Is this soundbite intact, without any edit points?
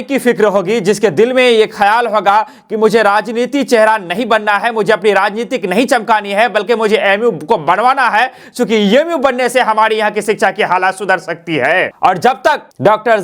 no; 1 cut; at 11.9 s

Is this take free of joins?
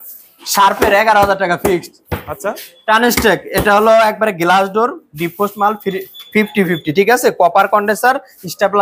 yes; 0 cuts

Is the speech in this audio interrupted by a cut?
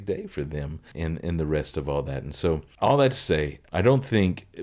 yes; 3 cuts; at 0.8 s, 2.7 s, 3.6 s

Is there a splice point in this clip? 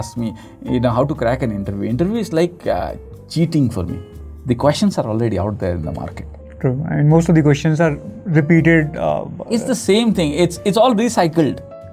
no; 0 cuts

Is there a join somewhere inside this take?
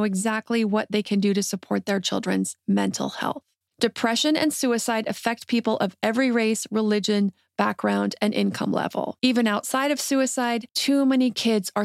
yes; 2 cuts; at 9.1 s, 10.7 s

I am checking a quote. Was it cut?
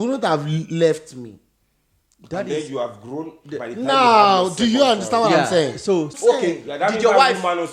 no; 0 cuts

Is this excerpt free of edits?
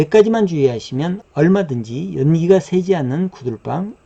yes; 0 cuts

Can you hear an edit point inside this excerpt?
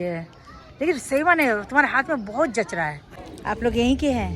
yes; 1 cut; at 3.1 s

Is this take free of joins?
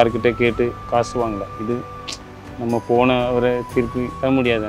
yes; 0 cuts

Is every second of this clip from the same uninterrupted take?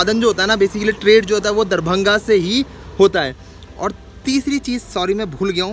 yes; 0 cuts

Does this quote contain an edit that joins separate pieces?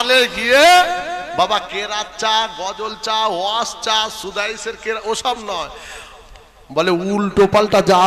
no; 0 cuts

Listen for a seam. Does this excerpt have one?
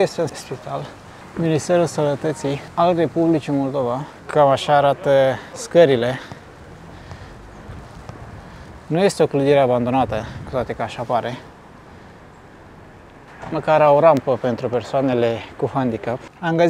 no; 0 cuts

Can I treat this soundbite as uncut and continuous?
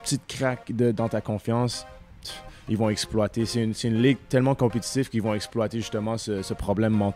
yes; 0 cuts

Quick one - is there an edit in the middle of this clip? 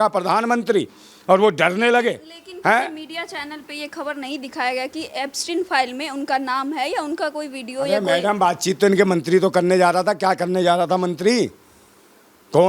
no; 0 cuts

